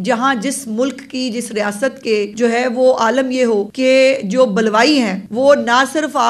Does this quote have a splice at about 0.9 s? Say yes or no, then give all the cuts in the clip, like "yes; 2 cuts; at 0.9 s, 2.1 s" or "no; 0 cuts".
no; 3 cuts; at 2.3 s, 3.7 s, 5.2 s